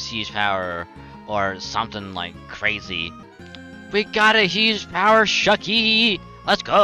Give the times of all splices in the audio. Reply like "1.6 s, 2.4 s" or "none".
3.3 s